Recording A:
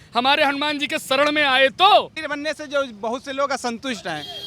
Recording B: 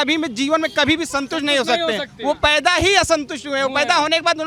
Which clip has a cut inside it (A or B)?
A